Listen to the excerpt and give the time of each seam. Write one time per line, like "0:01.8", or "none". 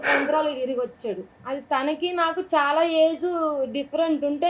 0:01.4